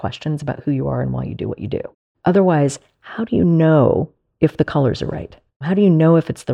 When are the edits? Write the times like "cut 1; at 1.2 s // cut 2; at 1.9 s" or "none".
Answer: cut 1; at 2.0 s // cut 2; at 4.2 s // cut 3; at 5.6 s